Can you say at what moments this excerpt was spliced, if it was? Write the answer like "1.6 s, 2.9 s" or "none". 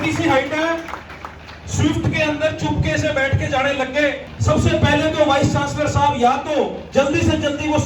4.3 s, 6.8 s